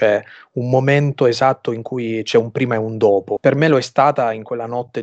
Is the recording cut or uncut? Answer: cut